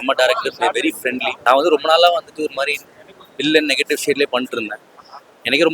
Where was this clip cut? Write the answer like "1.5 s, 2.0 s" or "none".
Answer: 1.3 s